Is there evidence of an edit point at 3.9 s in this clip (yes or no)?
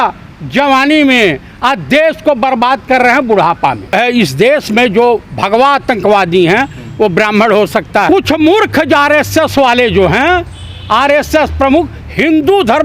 yes